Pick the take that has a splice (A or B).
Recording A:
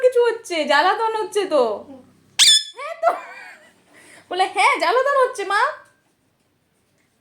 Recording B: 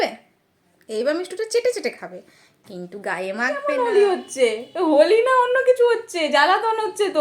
B